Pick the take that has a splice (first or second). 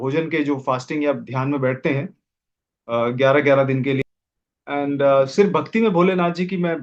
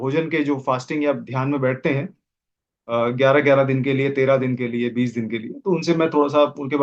first